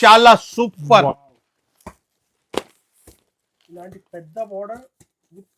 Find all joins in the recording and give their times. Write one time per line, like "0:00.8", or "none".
none